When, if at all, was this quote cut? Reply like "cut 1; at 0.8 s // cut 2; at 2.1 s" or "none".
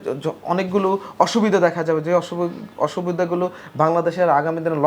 none